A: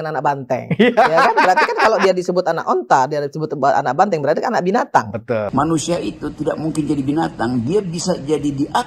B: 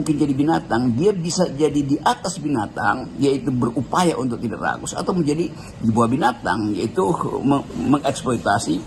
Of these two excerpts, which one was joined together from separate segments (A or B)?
A